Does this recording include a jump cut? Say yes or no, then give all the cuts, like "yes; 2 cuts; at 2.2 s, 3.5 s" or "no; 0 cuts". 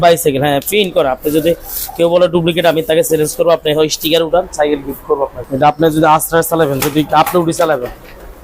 yes; 1 cut; at 5.4 s